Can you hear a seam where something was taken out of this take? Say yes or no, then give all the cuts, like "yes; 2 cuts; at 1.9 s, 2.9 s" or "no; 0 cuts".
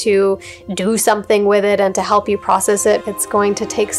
yes; 1 cut; at 3.0 s